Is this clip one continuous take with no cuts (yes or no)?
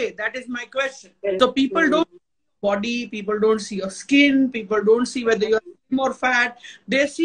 no